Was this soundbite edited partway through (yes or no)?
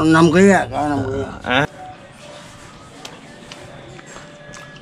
yes